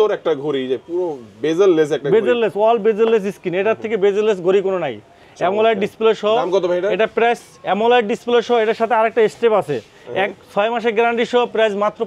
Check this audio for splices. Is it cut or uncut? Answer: uncut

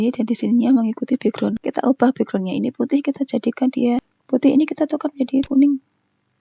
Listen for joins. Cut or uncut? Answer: cut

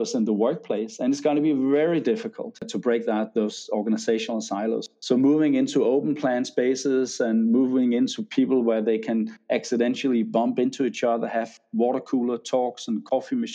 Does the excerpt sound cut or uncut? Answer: cut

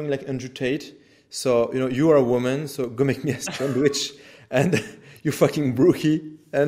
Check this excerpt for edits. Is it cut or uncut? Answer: uncut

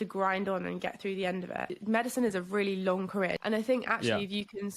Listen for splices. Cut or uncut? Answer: cut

